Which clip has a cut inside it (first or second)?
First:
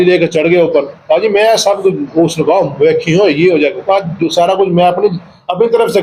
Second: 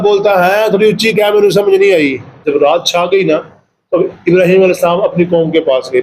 second